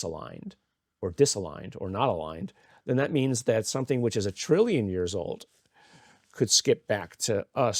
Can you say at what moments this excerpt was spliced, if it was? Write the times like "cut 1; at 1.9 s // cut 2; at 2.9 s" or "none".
none